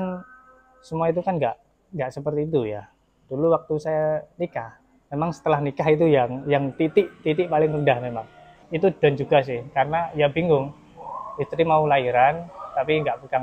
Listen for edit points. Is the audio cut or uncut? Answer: cut